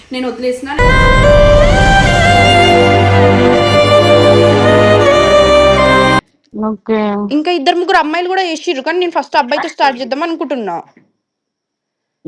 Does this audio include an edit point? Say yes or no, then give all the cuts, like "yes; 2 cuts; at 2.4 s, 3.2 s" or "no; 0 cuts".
yes; 1 cut; at 6.4 s